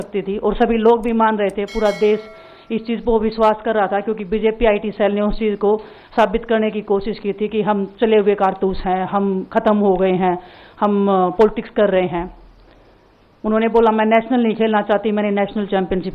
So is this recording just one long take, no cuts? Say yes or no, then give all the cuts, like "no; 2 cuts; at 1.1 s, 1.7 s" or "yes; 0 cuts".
yes; 0 cuts